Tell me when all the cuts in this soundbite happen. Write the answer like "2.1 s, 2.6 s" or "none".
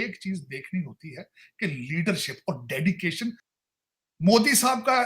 3.4 s